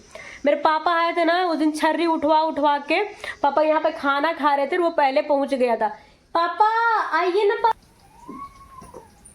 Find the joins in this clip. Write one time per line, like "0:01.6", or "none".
0:07.7

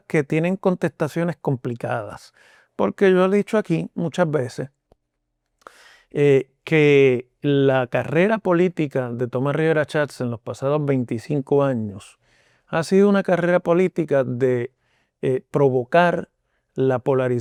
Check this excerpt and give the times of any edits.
none

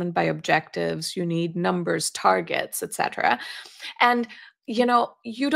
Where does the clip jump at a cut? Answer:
none

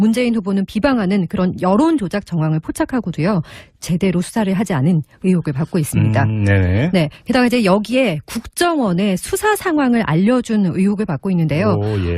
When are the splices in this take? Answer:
0:07.1

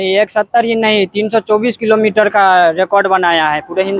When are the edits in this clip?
none

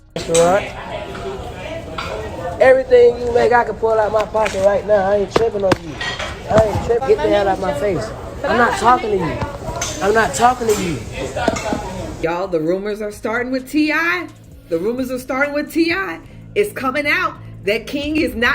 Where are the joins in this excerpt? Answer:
0:06.6
0:12.2

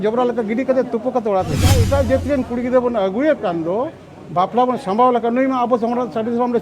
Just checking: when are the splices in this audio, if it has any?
0:01.8

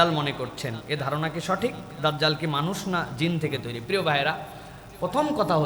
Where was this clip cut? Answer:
none

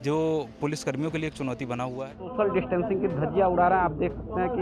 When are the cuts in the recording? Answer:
0:02.2

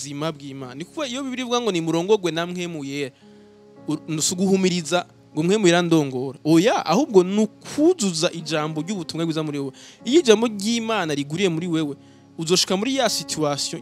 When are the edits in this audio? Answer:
none

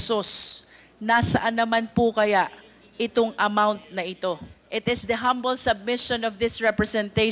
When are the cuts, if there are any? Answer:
0:04.5

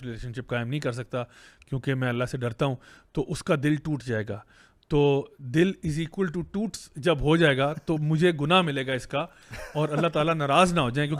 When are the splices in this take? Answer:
none

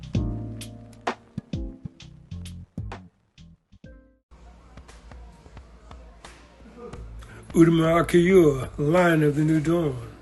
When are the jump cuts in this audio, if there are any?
0:04.2

